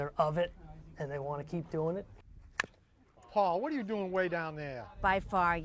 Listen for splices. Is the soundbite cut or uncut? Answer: uncut